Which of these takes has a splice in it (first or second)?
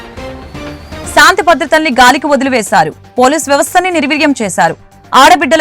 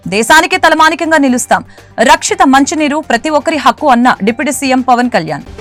first